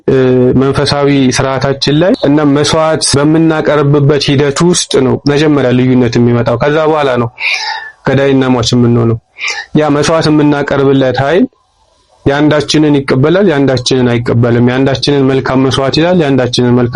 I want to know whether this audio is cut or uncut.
cut